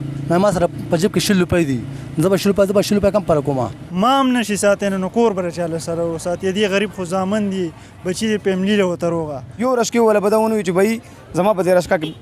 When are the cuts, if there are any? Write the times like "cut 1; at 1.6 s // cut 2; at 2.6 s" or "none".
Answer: cut 1; at 3.8 s // cut 2; at 9.4 s